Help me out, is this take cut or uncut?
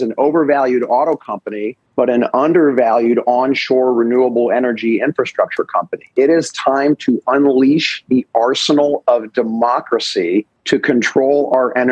uncut